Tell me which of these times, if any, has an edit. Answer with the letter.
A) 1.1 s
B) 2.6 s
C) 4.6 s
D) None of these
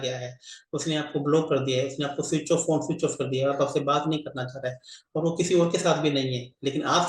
D